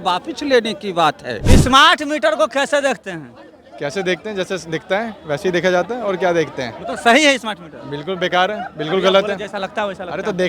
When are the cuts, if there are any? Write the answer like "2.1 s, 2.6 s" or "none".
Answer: 1.4 s